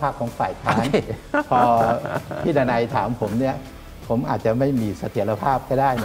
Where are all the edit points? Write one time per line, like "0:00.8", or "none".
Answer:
none

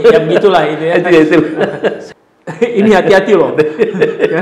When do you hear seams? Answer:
0:02.1

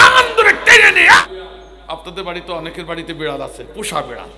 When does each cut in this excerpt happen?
0:01.2

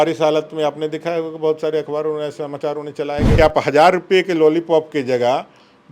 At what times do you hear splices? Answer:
0:03.3

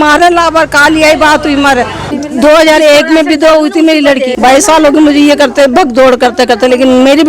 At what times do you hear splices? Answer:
0:02.0
0:04.3

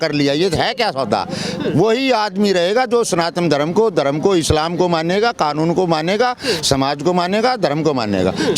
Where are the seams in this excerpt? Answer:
none

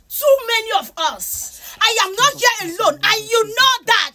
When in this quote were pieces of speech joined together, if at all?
none

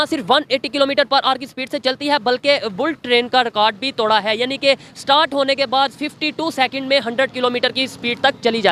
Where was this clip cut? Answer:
none

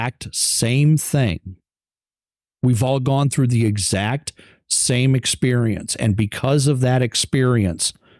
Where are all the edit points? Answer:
none

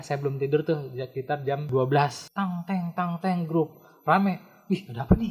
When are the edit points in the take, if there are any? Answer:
0:01.7
0:02.2

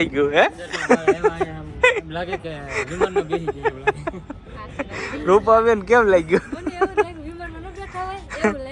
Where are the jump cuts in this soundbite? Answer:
none

